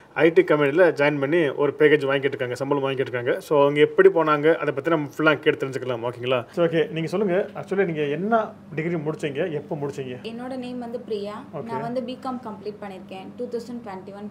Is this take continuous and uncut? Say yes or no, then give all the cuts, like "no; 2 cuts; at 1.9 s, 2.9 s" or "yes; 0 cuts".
yes; 0 cuts